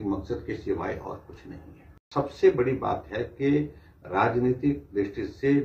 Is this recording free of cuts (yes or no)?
no